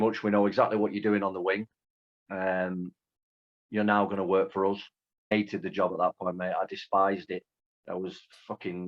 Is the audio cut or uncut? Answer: cut